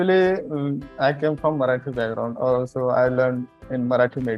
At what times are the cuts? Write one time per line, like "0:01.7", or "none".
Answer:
0:00.9